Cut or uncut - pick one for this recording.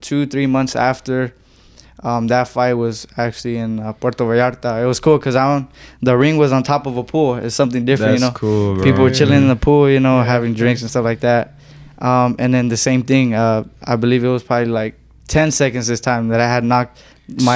uncut